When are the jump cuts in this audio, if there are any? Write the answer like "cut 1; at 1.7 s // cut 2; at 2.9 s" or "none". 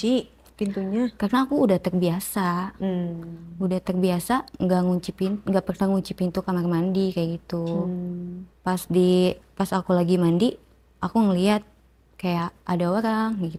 none

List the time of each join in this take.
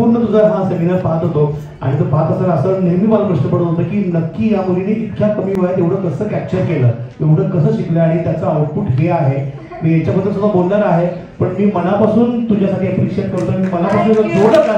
none

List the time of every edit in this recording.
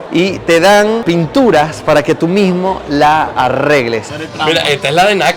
cut 1; at 1.0 s // cut 2; at 4.1 s

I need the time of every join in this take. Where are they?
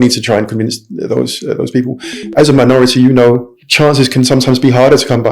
cut 1; at 3.6 s

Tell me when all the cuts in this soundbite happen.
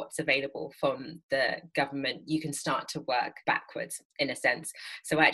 cut 1; at 3.3 s

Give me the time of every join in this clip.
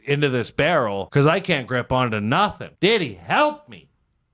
cut 1; at 1.0 s // cut 2; at 2.6 s

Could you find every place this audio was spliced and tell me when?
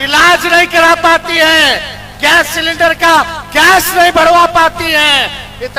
none

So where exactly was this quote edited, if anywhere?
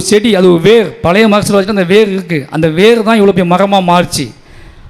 none

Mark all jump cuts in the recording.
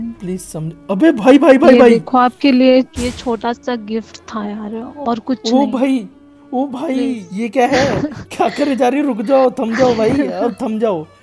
cut 1; at 2.9 s // cut 2; at 7.3 s

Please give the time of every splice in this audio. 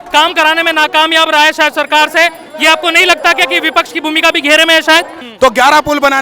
cut 1; at 5.2 s

